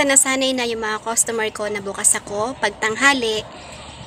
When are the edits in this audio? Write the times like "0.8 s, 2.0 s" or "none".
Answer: none